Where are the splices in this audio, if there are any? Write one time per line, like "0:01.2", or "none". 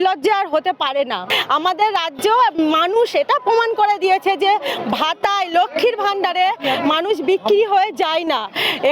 0:01.2